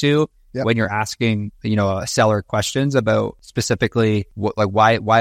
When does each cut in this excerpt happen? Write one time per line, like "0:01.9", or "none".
0:03.5
0:04.3